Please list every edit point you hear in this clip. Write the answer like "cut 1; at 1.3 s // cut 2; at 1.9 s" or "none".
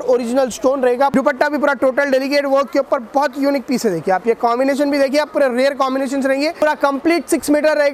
cut 1; at 1.1 s // cut 2; at 6.6 s

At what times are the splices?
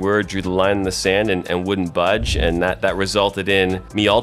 none

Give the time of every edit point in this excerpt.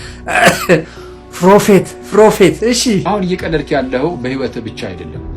cut 1; at 3.0 s

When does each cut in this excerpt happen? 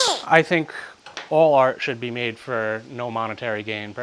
none

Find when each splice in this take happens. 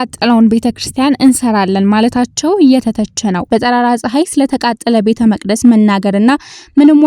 cut 1; at 3.4 s

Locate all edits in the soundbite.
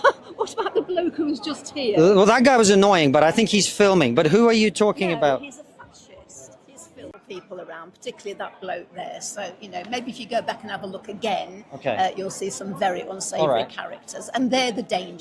cut 1; at 7.1 s

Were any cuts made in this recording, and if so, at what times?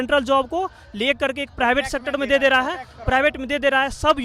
none

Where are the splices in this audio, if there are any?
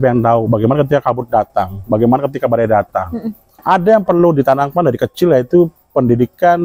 cut 1; at 3.6 s

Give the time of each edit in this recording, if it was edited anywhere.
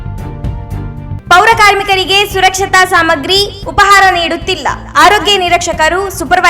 cut 1; at 1.2 s

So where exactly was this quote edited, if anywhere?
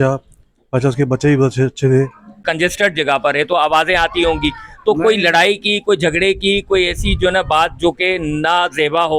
cut 1; at 2.4 s

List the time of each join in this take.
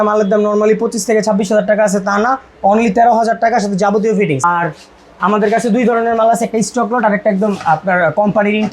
cut 1; at 4.4 s

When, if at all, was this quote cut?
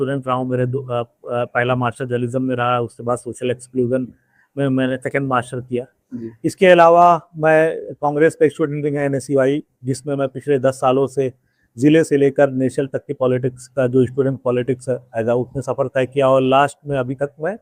none

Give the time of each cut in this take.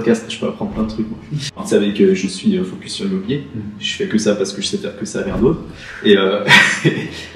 cut 1; at 1.6 s

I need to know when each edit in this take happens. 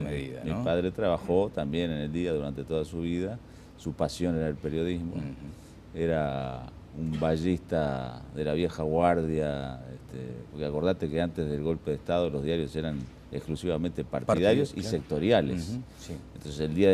cut 1; at 13.2 s

